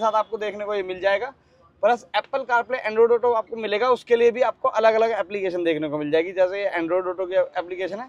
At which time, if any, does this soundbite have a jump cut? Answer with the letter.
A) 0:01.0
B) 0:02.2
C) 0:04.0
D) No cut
D